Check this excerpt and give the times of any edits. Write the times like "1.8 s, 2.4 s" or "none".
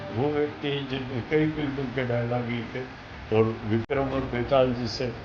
none